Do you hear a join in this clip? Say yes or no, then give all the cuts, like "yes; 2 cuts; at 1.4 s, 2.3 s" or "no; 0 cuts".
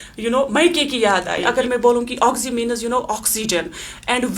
yes; 1 cut; at 1.5 s